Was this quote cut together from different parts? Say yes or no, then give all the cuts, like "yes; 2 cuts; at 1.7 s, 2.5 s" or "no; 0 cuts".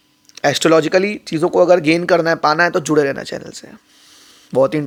no; 0 cuts